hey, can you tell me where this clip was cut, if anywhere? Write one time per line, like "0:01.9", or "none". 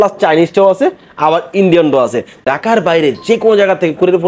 0:02.4